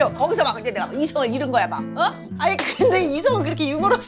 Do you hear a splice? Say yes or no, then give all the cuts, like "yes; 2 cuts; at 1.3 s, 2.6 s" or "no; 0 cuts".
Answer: no; 0 cuts